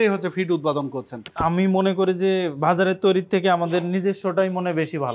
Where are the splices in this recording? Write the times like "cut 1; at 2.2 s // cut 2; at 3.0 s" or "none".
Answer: cut 1; at 1.3 s